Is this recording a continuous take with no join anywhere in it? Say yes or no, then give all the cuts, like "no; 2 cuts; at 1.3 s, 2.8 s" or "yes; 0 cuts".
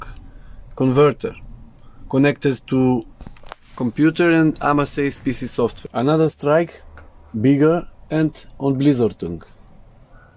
no; 1 cut; at 5.8 s